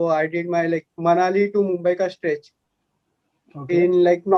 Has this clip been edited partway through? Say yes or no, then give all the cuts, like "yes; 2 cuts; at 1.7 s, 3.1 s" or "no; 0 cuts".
no; 0 cuts